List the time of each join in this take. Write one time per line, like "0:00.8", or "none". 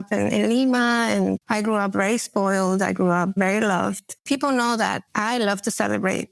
0:01.4
0:04.2
0:05.1

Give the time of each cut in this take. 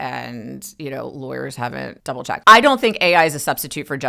0:02.2

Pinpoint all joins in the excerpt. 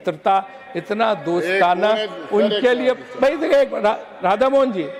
none

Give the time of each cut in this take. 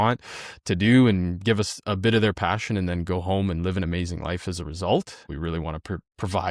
0:05.3

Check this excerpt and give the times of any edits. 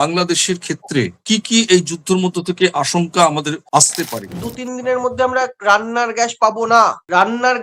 0:01.2
0:04.0

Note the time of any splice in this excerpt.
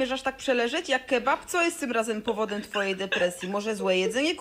0:01.6

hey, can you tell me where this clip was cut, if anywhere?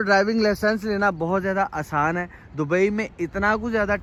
none

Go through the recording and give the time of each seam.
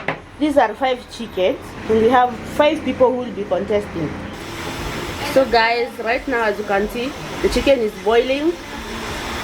0:04.5

